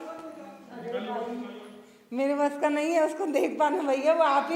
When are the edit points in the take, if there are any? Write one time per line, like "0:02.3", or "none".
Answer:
none